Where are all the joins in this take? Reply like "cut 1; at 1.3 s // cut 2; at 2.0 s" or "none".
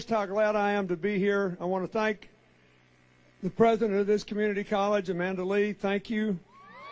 cut 1; at 1.9 s